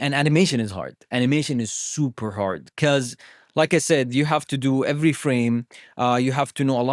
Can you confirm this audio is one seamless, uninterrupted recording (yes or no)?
yes